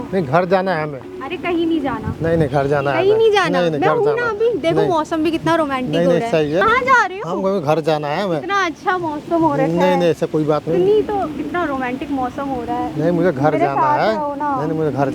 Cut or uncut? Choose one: uncut